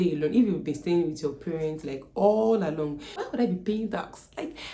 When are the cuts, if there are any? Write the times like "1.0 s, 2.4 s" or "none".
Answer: 3.2 s